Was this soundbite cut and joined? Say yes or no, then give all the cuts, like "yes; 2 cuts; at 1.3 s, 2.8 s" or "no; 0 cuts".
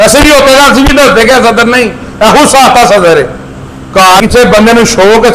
yes; 1 cut; at 4.2 s